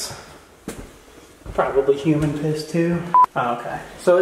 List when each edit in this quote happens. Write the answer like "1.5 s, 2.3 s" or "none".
3.2 s